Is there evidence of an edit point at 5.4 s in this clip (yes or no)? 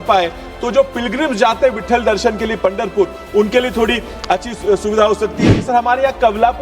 yes